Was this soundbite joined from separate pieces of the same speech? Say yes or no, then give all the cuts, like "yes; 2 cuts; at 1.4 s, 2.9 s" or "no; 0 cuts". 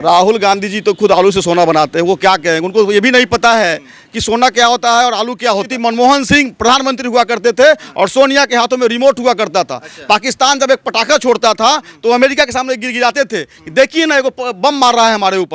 yes; 1 cut; at 5.7 s